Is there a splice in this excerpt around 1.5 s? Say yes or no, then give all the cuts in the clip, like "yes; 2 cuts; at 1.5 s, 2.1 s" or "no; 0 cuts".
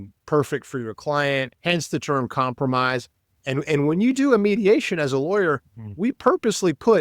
yes; 1 cut; at 1.5 s